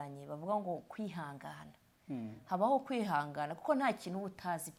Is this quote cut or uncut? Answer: uncut